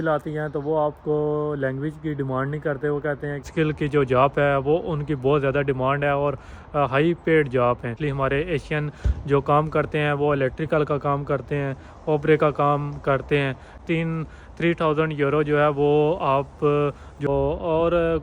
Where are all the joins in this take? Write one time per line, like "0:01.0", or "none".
0:03.5
0:07.9
0:13.7
0:17.3